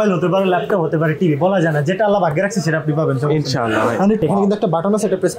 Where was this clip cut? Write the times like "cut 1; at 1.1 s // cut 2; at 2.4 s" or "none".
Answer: cut 1; at 4.2 s